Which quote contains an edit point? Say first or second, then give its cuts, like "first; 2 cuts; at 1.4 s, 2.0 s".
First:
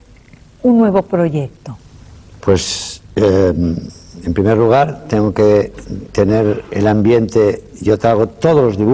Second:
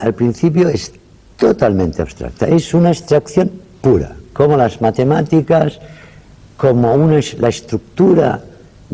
second; 1 cut; at 3.8 s